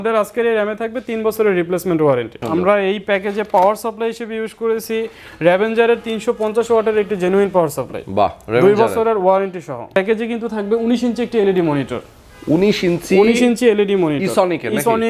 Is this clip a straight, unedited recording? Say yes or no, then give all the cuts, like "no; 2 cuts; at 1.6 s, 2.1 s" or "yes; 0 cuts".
no; 2 cuts; at 2.4 s, 9.8 s